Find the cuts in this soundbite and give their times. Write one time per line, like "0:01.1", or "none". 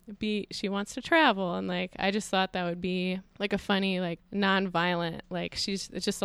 0:03.3
0:04.2